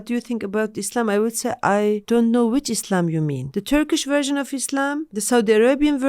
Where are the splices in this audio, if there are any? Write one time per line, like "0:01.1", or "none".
0:02.0
0:03.5
0:05.1